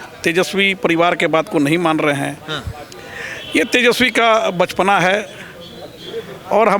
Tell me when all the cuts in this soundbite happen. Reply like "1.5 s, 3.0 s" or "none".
none